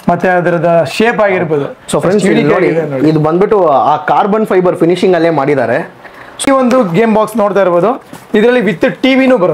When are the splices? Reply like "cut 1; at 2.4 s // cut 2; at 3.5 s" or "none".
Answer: cut 1; at 6.5 s